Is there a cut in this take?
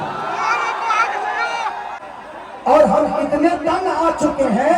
yes; 1 cut; at 2.1 s

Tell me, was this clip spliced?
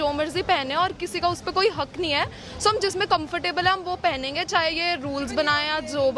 no; 0 cuts

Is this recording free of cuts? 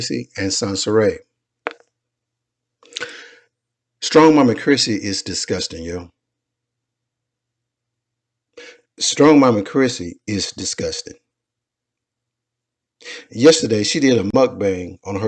yes; 0 cuts

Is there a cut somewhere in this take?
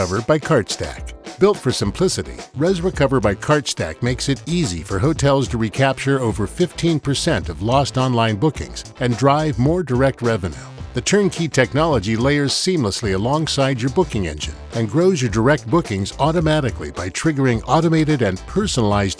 no; 0 cuts

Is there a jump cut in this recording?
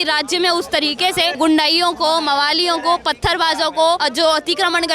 yes; 2 cuts; at 1.3 s, 4.0 s

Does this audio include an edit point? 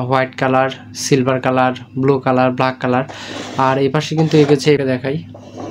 yes; 1 cut; at 4.8 s

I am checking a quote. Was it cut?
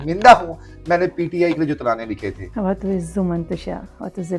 yes; 1 cut; at 2.4 s

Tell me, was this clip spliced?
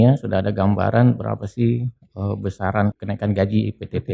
yes; 1 cut; at 3.0 s

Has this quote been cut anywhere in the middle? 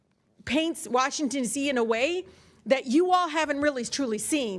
no; 0 cuts

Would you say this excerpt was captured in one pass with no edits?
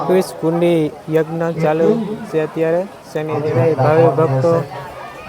no; 1 cut; at 3.4 s

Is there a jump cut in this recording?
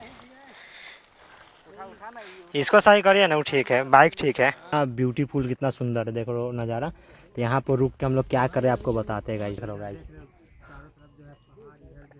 yes; 1 cut; at 4.7 s

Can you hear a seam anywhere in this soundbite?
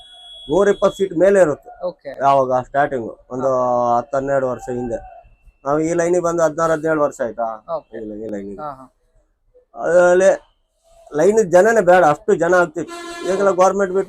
no; 0 cuts

